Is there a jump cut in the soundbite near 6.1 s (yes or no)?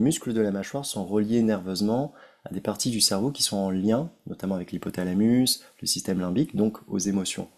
no